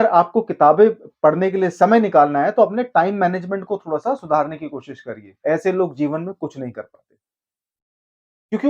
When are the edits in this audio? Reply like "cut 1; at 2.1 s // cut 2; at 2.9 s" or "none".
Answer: cut 1; at 5.3 s